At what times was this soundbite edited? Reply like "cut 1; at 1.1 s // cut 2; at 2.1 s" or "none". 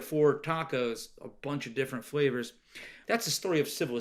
cut 1; at 2.9 s